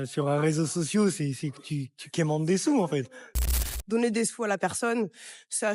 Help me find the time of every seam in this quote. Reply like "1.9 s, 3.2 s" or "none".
3.7 s